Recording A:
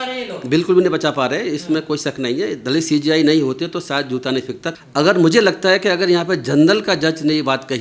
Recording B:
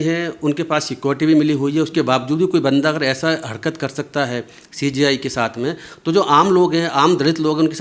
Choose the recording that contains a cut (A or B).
A